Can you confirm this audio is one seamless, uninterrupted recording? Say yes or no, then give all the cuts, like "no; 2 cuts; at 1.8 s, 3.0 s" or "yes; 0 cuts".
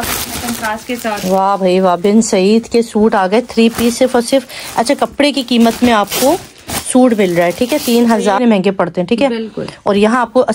no; 1 cut; at 8.4 s